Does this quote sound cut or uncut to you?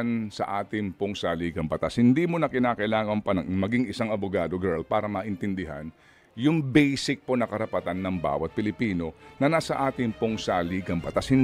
uncut